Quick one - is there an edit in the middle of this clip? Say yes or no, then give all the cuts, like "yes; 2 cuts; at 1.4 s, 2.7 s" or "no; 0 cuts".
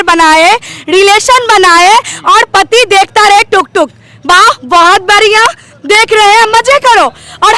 no; 0 cuts